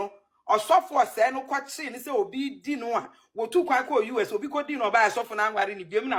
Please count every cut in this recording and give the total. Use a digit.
0